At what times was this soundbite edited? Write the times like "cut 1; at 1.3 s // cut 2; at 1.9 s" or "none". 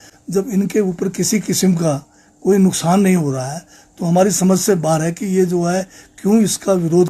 none